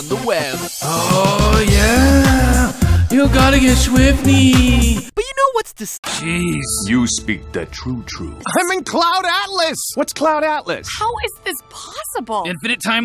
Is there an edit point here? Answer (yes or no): no